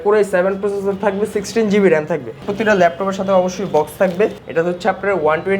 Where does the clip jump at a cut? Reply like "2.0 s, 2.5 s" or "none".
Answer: 2.4 s, 4.4 s